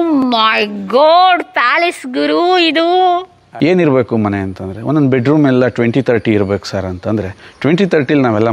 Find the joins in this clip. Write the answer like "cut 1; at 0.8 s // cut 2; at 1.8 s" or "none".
cut 1; at 3.4 s